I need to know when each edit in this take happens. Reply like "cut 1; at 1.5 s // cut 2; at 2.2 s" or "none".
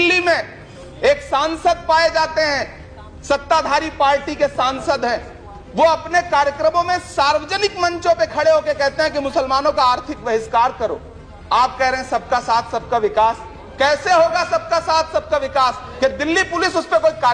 cut 1; at 15.9 s